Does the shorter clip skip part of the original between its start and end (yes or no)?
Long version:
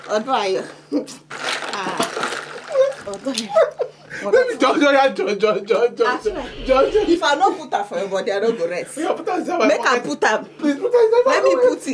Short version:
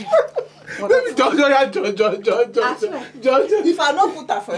no